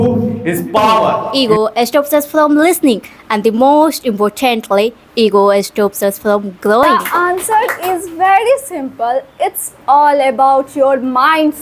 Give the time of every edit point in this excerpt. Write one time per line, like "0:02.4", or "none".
0:01.3
0:06.9